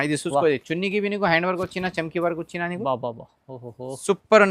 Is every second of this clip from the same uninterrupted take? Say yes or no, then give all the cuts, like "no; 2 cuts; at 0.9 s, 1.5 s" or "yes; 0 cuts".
yes; 0 cuts